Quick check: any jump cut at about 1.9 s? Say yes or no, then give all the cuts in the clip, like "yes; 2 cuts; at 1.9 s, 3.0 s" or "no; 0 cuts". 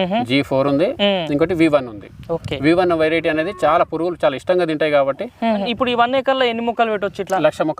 no; 1 cut; at 5.7 s